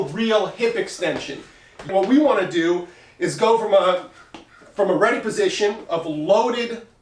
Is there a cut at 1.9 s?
yes; 1 cut; at 1.9 s

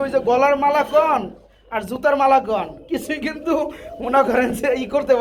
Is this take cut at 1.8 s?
no; 0 cuts

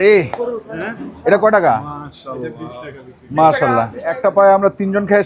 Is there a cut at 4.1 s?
yes; 1 cut; at 4.1 s

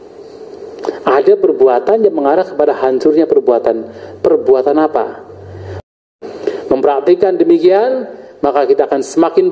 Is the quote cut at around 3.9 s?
no; 1 cut; at 5.8 s

